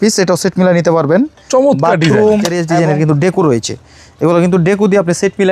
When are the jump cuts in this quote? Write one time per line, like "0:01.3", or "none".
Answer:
0:02.6